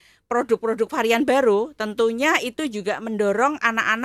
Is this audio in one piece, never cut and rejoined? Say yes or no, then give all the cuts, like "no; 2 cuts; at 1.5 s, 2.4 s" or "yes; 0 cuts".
yes; 0 cuts